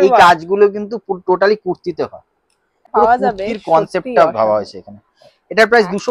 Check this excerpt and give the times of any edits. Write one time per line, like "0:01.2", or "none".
0:02.9